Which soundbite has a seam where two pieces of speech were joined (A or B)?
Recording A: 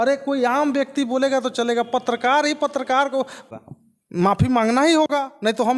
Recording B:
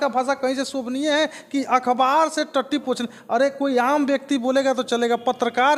A